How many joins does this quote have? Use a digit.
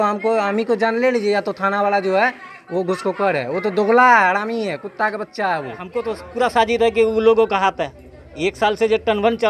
1